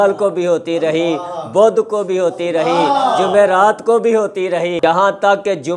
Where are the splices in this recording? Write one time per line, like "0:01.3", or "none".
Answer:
none